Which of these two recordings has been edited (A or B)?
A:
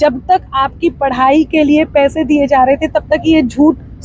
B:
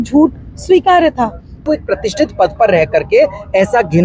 B